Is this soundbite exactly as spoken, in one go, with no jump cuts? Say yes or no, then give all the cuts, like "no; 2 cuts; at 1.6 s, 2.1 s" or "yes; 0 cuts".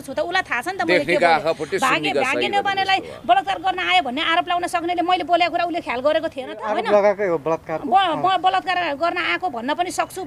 no; 1 cut; at 6.6 s